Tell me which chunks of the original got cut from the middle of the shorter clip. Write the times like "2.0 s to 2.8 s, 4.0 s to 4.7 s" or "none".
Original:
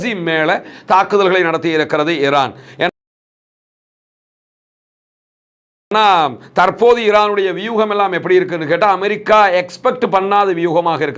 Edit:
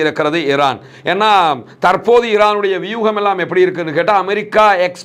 2.9 s to 5.9 s